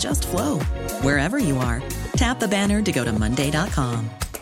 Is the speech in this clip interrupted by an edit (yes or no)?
no